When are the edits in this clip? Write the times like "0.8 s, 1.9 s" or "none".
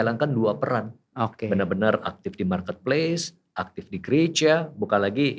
none